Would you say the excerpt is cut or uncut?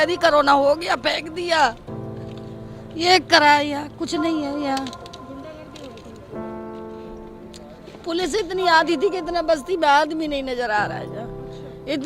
uncut